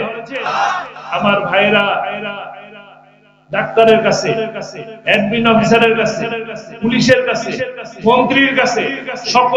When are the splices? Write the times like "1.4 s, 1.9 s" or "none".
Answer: none